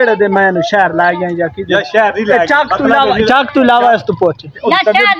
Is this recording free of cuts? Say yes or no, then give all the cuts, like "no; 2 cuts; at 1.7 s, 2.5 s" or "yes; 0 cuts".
yes; 0 cuts